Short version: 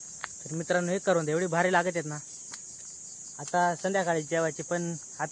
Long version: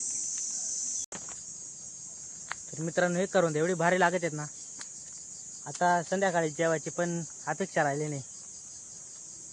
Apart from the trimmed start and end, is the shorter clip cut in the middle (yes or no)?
no